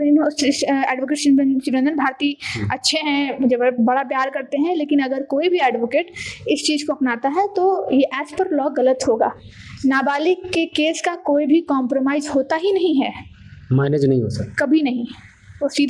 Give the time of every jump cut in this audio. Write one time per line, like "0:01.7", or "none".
none